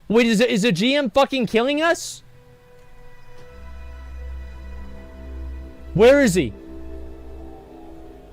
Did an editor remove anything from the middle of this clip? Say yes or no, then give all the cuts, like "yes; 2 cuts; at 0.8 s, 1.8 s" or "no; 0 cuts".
no; 0 cuts